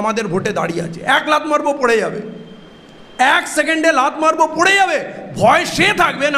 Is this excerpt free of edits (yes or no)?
yes